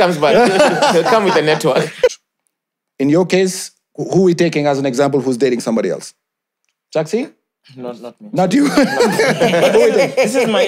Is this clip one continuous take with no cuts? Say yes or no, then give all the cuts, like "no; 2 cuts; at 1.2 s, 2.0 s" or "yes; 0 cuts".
no; 1 cut; at 2.1 s